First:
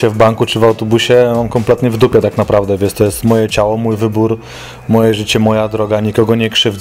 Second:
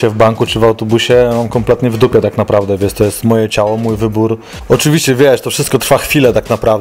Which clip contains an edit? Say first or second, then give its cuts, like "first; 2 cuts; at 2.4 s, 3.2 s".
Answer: second; 1 cut; at 4.5 s